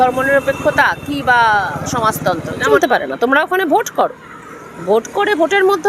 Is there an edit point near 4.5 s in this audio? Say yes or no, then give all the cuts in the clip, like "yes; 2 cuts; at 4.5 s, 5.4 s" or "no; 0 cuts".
no; 1 cut; at 2.6 s